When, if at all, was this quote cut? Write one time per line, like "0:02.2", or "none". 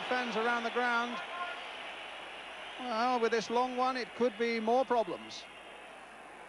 none